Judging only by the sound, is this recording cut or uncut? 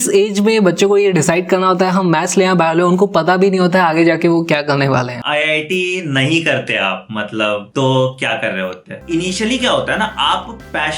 cut